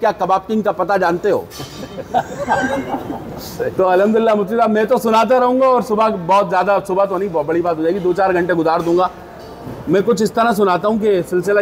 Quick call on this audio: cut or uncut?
uncut